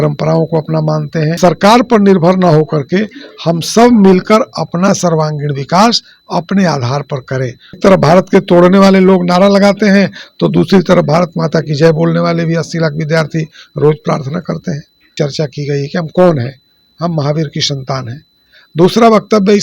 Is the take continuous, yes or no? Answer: no